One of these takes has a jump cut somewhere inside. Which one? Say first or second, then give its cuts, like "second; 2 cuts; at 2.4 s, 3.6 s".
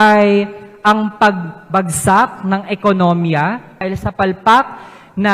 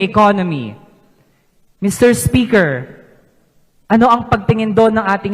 first; 1 cut; at 3.7 s